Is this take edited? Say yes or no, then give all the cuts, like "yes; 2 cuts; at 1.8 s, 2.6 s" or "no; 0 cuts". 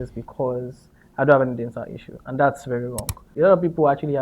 yes; 1 cut; at 3.2 s